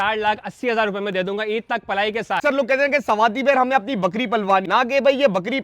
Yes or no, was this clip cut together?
yes